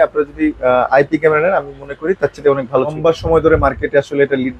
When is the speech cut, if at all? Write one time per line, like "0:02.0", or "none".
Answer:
0:03.0